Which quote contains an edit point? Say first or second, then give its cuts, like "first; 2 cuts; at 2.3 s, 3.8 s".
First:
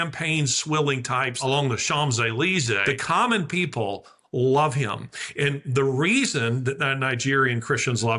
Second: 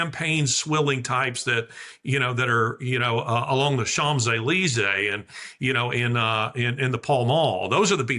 first; 2 cuts; at 1.4 s, 2.8 s